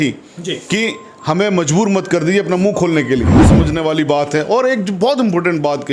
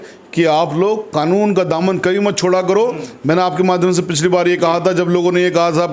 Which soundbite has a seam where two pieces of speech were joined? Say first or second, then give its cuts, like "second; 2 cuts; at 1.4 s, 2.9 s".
first; 1 cut; at 3.6 s